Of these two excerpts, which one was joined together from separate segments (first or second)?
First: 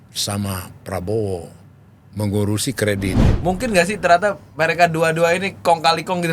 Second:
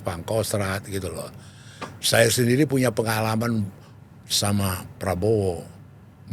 first